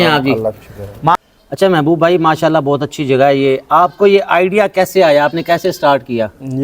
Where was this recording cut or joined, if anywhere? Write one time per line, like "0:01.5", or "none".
0:01.2